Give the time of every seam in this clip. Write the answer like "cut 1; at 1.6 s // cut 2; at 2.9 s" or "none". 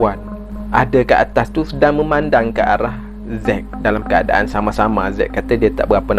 none

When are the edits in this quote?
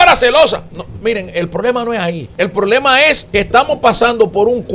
cut 1; at 2.2 s // cut 2; at 3.2 s

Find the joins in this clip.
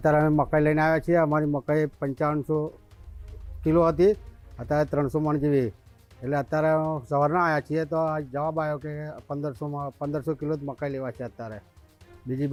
none

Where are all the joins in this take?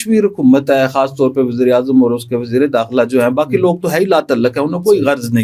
none

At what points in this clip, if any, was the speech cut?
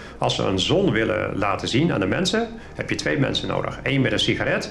none

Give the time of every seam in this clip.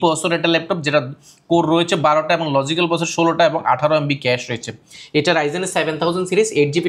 cut 1; at 4.8 s

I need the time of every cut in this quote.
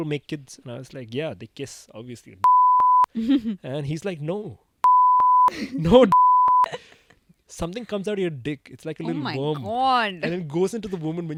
none

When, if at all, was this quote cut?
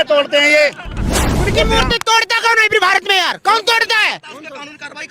cut 1; at 1.4 s

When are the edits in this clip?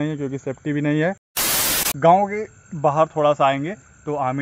cut 1; at 1.5 s

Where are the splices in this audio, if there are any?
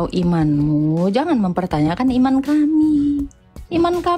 none

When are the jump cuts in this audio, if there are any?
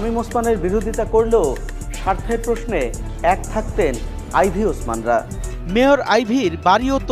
cut 1; at 5.5 s

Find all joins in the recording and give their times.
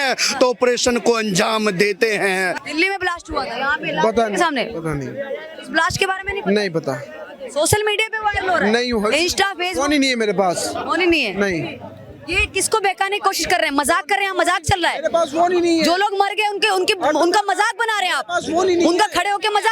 cut 1; at 2.6 s

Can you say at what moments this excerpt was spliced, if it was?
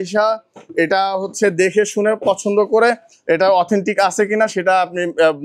none

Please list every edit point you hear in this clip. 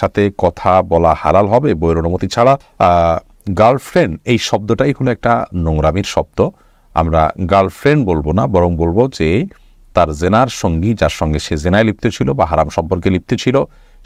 none

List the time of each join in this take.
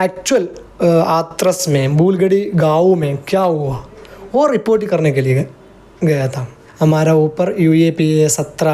cut 1; at 6.6 s

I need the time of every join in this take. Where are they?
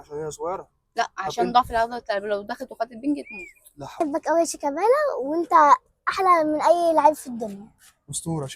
cut 1; at 3.9 s

